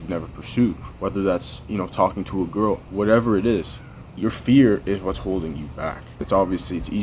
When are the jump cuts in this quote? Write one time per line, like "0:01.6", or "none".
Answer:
none